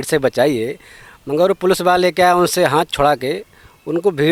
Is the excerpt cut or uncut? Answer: uncut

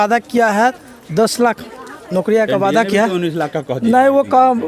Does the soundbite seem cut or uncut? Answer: uncut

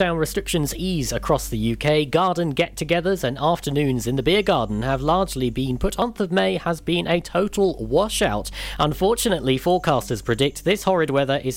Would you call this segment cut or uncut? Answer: cut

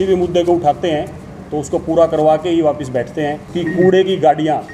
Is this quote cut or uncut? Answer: cut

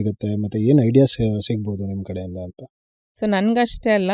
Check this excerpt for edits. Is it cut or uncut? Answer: cut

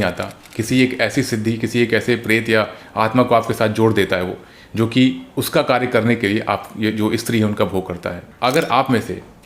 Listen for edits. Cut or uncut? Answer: cut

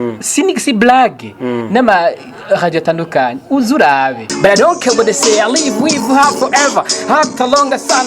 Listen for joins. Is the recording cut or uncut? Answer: cut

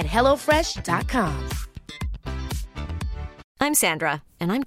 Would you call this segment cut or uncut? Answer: cut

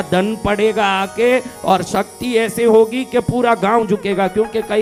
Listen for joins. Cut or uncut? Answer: uncut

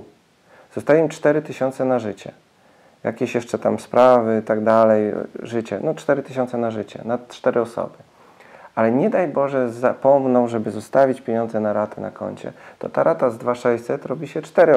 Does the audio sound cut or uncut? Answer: uncut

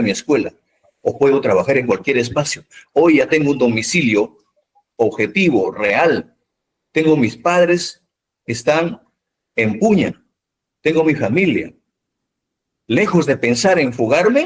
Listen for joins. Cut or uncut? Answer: uncut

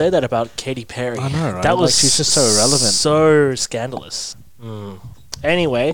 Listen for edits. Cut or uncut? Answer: cut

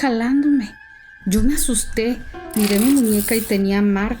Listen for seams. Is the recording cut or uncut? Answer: cut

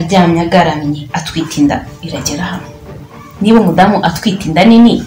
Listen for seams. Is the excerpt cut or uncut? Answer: cut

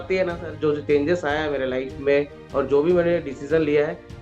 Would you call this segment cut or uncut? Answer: uncut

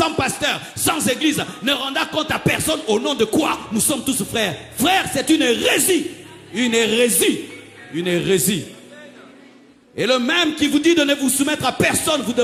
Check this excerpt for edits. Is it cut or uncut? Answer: uncut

